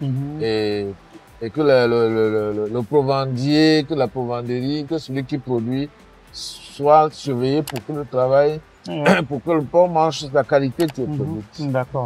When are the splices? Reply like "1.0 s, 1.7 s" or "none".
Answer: none